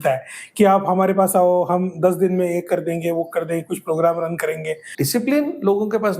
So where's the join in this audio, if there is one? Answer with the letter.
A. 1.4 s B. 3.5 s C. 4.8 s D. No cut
C